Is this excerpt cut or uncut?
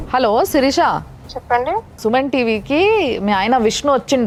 uncut